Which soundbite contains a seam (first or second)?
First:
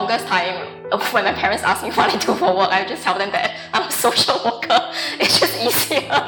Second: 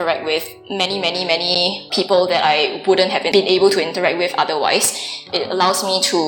second